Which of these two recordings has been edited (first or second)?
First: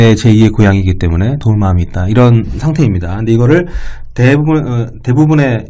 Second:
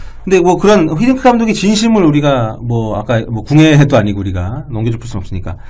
first